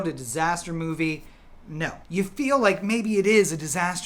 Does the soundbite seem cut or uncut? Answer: cut